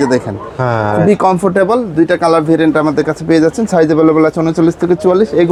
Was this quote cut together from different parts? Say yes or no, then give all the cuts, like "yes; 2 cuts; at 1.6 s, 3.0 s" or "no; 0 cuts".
no; 0 cuts